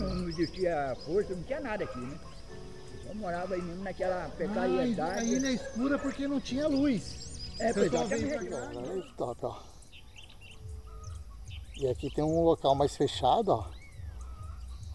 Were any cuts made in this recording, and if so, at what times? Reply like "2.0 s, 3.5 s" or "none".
8.7 s